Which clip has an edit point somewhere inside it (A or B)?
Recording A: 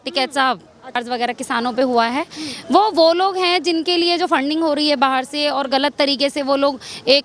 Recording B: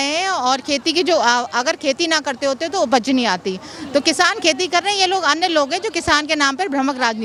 A